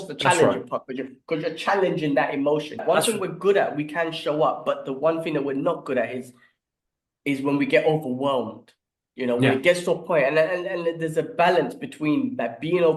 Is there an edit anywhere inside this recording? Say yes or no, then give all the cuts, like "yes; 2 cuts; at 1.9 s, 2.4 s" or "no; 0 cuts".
yes; 1 cut; at 2.8 s